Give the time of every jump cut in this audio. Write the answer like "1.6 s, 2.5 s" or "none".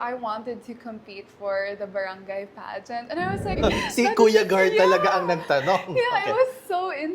3.6 s